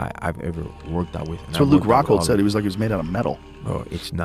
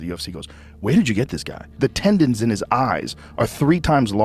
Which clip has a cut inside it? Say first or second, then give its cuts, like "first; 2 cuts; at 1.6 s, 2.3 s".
second; 1 cut; at 1.7 s